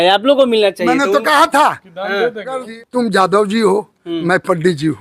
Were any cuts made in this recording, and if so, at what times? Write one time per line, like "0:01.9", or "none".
0:02.7

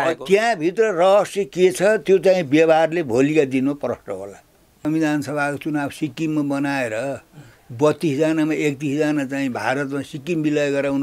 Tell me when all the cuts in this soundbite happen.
0:04.8

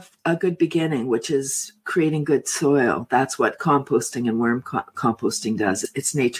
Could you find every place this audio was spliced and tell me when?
none

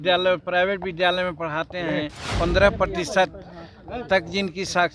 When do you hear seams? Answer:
0:02.3

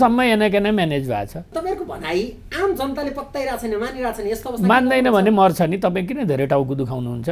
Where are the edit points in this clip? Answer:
0:01.5

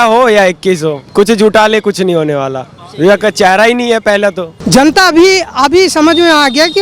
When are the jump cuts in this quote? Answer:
0:01.0
0:04.5

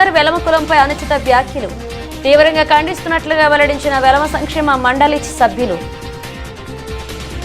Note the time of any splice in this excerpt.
none

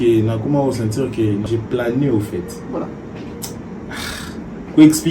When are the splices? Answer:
0:01.4

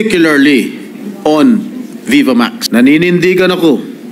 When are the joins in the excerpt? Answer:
0:02.6

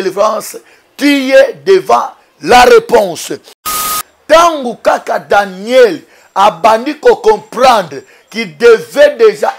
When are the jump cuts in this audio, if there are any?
0:03.8

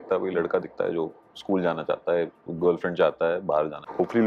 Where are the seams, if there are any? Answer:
none

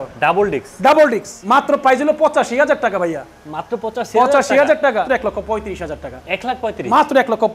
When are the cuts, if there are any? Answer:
0:01.3
0:05.1

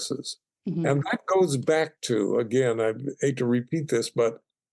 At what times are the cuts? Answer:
none

